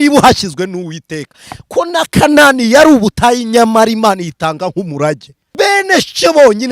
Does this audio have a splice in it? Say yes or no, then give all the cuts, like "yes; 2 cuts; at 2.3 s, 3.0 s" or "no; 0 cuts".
yes; 1 cut; at 5.4 s